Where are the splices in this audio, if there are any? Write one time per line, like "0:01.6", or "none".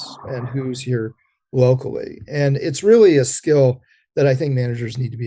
none